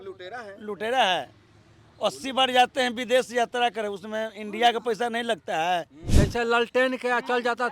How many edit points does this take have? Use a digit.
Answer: 1